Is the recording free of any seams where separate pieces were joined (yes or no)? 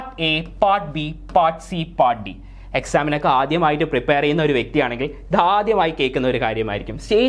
yes